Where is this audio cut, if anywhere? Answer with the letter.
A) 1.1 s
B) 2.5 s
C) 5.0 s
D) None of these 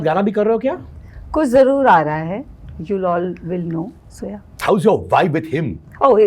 D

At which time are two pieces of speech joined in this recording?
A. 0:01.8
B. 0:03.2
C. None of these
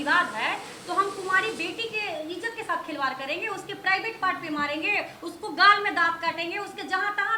C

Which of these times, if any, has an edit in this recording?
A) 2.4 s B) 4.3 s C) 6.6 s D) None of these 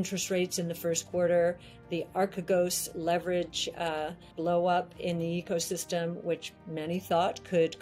B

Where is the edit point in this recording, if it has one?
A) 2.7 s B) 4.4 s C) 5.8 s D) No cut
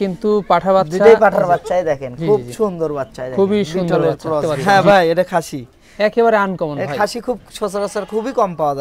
B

